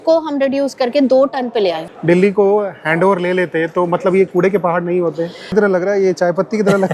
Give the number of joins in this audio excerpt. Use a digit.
2